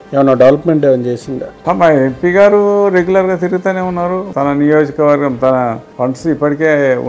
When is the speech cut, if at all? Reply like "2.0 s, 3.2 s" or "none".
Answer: 1.6 s, 5.9 s